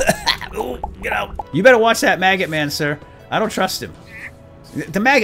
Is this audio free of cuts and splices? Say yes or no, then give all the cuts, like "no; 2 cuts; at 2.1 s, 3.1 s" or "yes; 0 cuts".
no; 1 cut; at 1.4 s